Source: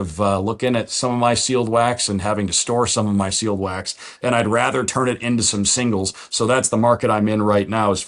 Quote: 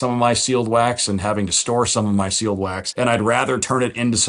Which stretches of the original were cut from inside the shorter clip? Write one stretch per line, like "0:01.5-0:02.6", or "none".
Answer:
0:03.8-0:04.1